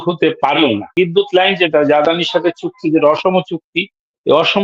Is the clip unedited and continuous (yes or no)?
no